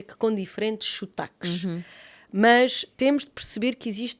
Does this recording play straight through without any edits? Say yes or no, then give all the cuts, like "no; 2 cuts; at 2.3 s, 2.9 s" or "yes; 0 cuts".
no; 1 cut; at 2.8 s